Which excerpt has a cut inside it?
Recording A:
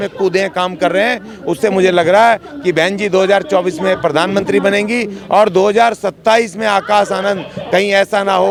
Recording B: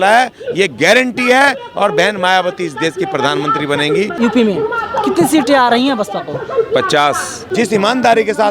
B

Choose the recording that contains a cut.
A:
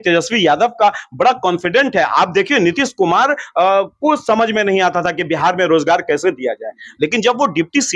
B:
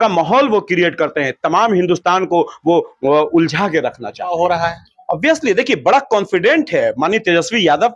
B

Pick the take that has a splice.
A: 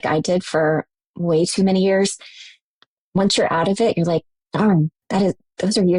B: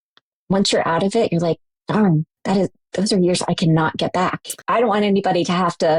B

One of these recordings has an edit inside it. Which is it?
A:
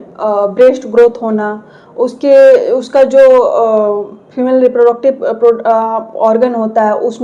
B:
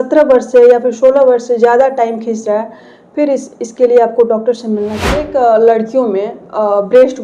B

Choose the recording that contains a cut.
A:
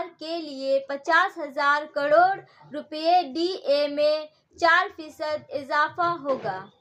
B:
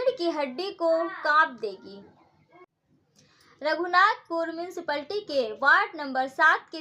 B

